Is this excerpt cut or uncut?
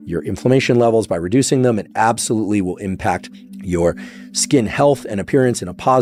uncut